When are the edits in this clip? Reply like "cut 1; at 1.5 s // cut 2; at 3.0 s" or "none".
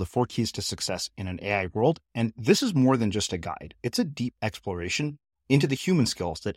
none